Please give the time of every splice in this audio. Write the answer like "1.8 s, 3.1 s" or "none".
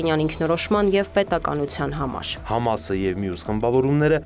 2.4 s